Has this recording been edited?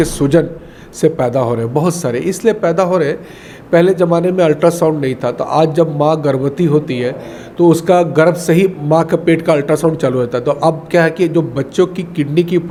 no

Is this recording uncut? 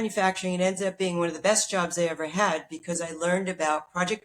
yes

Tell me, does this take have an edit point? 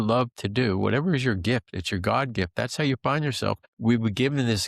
yes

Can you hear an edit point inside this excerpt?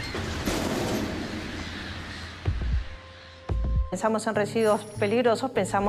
no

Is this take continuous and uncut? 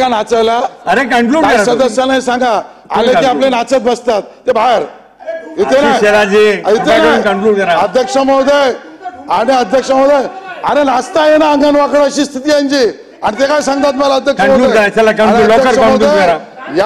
yes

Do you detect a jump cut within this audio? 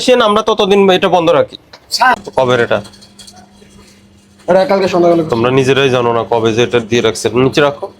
yes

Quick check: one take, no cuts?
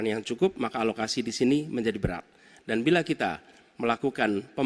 yes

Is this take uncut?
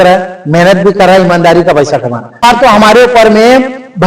no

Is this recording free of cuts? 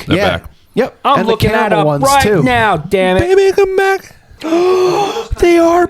no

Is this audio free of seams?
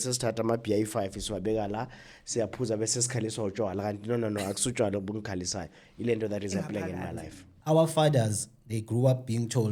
no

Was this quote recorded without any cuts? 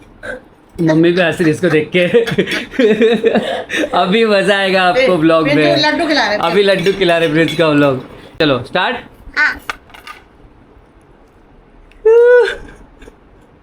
no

